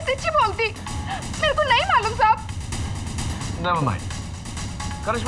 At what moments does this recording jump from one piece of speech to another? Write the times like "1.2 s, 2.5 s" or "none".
none